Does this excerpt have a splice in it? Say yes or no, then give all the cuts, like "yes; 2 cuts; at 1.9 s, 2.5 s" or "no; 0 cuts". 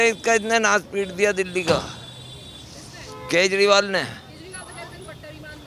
no; 0 cuts